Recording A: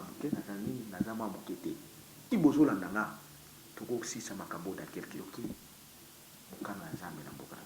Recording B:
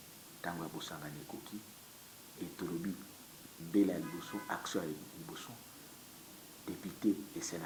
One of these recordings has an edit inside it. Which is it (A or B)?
A